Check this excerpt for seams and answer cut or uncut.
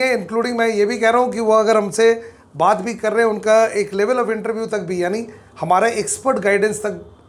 uncut